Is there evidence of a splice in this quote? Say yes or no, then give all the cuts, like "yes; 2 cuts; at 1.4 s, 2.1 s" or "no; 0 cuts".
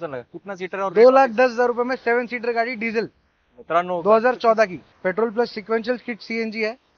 yes; 1 cut; at 4.8 s